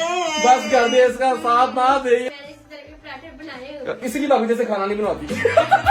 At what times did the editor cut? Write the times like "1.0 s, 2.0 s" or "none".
2.3 s, 4.0 s